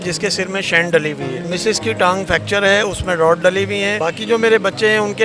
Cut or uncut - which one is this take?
cut